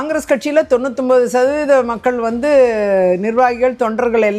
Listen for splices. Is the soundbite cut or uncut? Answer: uncut